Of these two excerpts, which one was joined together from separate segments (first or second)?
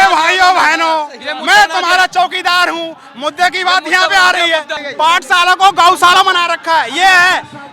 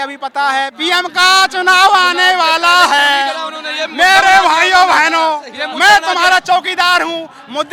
first